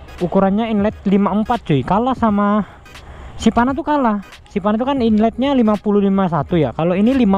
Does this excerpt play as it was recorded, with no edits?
yes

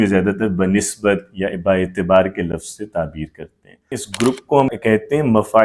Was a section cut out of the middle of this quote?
yes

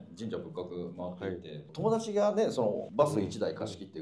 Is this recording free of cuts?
no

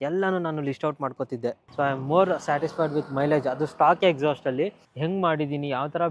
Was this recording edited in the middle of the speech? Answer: yes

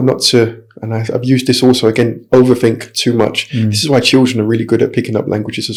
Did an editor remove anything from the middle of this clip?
no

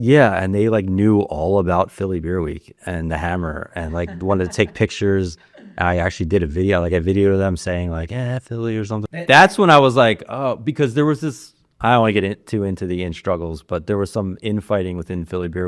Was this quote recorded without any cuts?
no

